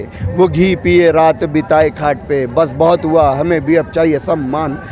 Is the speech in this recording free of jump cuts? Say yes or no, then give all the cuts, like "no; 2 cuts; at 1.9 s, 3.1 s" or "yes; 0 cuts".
yes; 0 cuts